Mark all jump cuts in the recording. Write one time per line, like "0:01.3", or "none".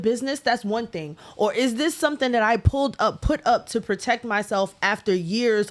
none